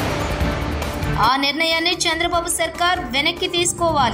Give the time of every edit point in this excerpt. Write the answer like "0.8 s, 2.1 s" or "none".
1.1 s